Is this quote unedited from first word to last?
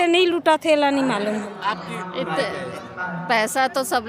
no; 1 cut; at 1.5 s

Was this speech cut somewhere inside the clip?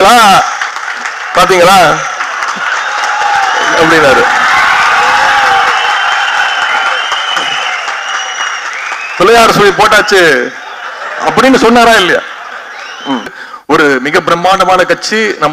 yes; 1 cut; at 13.5 s

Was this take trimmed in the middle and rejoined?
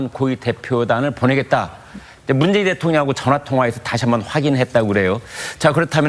yes; 1 cut; at 4.0 s

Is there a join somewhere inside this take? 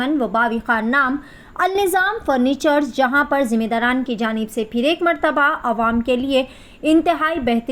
no; 0 cuts

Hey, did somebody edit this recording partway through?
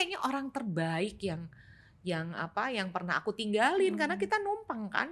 no; 0 cuts

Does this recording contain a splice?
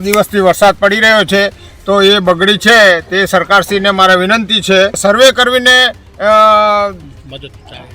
yes; 1 cut; at 5.0 s

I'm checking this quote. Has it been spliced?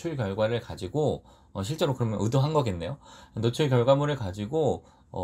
no; 0 cuts

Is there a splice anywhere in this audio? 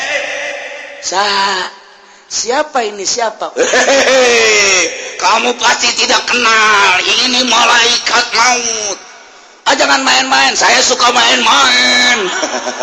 no; 0 cuts

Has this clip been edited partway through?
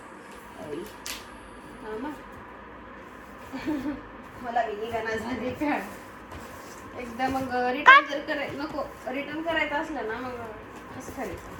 no; 0 cuts

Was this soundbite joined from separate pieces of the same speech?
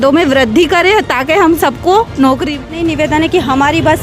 yes; 1 cut; at 2.6 s

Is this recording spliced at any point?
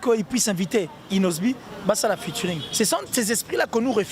yes; 1 cut; at 2.6 s

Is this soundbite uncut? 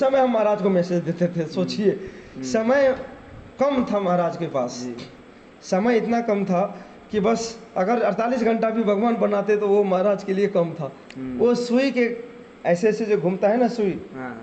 yes; 0 cuts

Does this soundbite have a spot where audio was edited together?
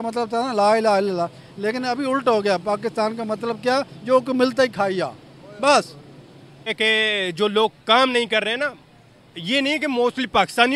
yes; 1 cut; at 6.7 s

